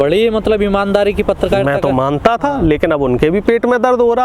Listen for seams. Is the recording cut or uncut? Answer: uncut